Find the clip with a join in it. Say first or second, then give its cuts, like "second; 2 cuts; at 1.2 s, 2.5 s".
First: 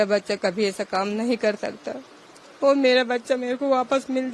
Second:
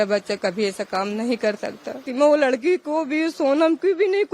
second; 1 cut; at 2.0 s